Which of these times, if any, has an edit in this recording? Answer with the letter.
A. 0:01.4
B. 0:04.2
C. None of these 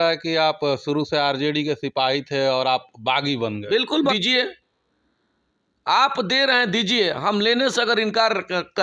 B